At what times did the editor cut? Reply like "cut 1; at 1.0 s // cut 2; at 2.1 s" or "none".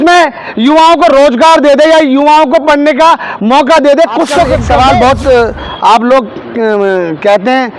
cut 1; at 4.6 s